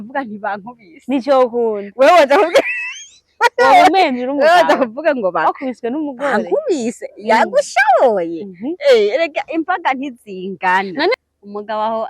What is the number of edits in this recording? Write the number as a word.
one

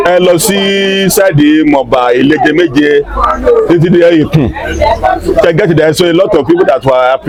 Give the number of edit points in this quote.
zero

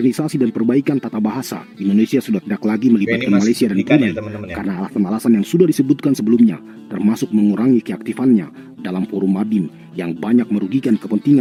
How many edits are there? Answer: zero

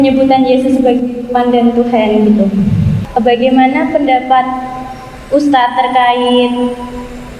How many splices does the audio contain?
one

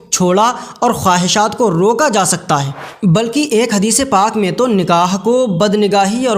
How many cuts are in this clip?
one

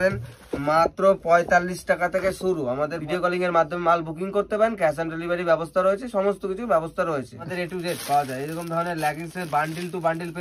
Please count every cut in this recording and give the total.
two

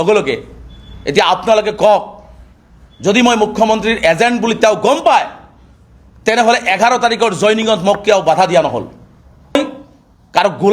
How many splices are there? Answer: one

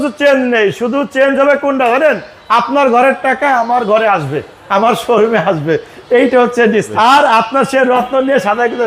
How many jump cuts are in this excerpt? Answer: one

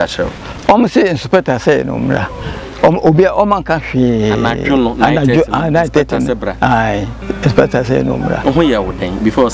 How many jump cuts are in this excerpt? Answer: one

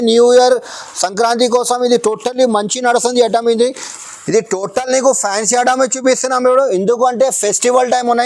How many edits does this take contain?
one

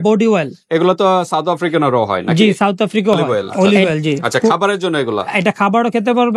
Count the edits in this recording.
one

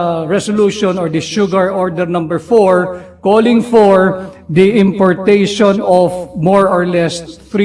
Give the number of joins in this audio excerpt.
zero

